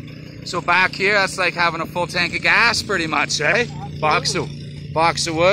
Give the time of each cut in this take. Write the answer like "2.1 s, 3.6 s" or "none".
none